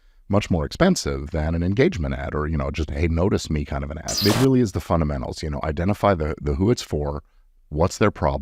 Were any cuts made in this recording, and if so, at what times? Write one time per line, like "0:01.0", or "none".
0:04.2